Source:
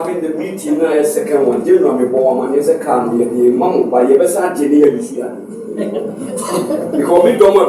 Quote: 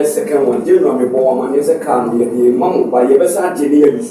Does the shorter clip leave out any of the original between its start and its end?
no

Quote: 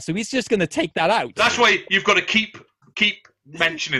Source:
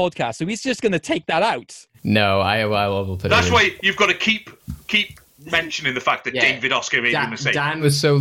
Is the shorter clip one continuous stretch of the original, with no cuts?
no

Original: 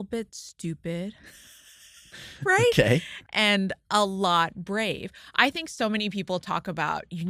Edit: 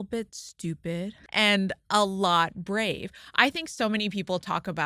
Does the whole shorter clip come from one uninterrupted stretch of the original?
no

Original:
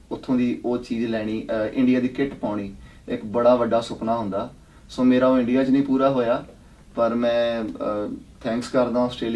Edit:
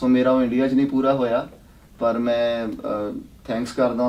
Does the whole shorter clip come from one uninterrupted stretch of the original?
yes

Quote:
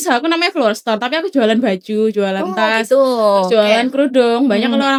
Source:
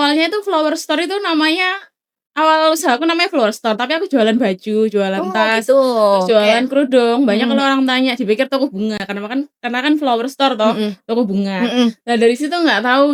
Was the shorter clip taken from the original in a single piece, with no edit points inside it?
yes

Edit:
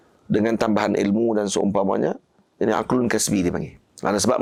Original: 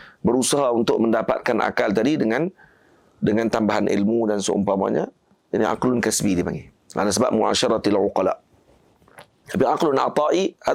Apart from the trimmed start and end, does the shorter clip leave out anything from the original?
no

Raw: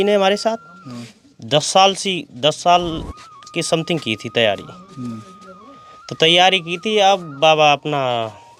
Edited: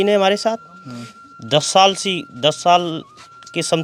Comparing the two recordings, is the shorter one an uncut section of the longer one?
yes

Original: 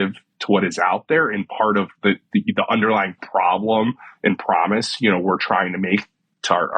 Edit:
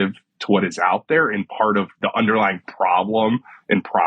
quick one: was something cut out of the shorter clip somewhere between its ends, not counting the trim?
yes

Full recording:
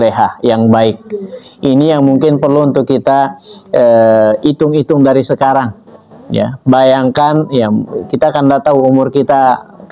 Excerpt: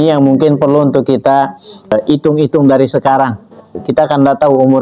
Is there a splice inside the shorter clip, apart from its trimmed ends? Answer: yes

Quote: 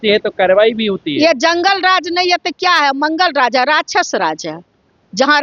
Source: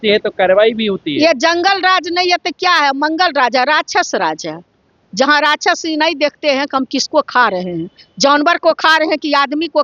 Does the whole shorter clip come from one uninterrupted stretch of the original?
yes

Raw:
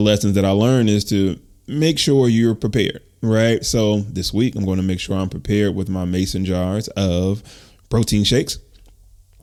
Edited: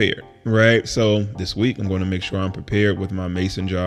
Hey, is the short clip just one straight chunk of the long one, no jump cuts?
yes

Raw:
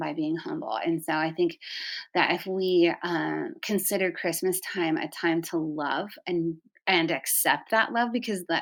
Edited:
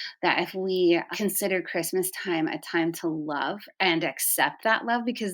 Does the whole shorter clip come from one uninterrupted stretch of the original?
no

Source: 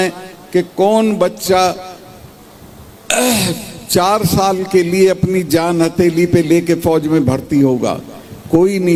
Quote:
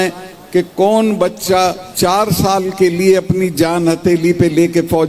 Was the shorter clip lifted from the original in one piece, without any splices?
no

